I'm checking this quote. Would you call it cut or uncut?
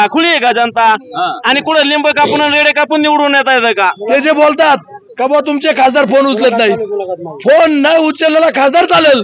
cut